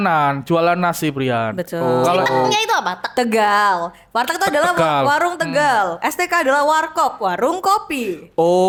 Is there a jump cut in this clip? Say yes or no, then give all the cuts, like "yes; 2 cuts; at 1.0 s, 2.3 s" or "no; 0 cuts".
no; 0 cuts